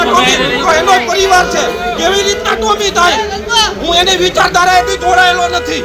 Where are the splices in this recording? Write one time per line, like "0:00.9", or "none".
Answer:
none